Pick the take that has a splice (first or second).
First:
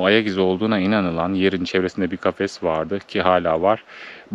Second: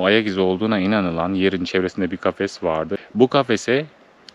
second